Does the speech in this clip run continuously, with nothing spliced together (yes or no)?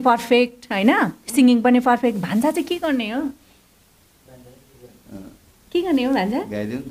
yes